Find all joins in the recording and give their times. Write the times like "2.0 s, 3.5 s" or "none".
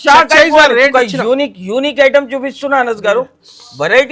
0.9 s